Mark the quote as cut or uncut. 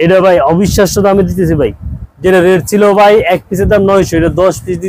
uncut